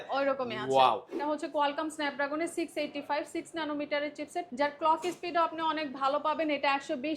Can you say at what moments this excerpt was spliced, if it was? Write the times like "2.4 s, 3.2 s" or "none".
1.1 s, 4.5 s